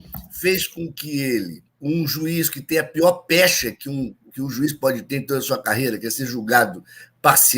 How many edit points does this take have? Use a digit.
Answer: 1